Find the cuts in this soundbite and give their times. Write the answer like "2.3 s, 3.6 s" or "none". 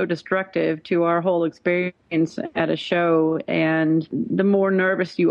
4.1 s